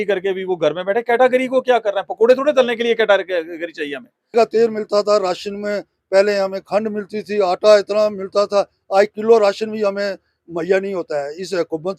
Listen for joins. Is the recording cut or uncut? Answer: cut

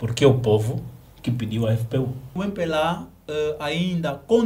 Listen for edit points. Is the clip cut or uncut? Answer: cut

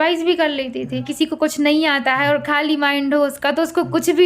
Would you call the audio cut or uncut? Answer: cut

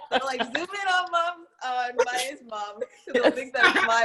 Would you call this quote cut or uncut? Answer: uncut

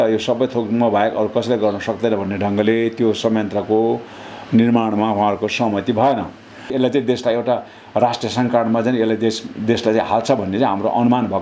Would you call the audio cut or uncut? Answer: cut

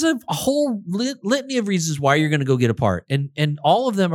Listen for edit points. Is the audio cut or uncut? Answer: uncut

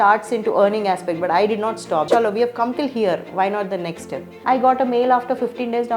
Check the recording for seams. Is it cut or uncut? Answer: cut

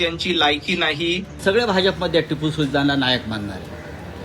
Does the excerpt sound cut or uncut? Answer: cut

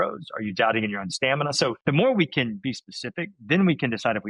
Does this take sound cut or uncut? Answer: cut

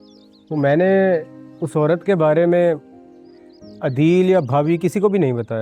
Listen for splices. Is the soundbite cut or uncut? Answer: uncut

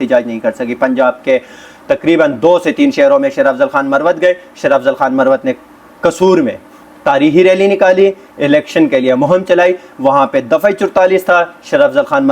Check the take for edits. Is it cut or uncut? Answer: uncut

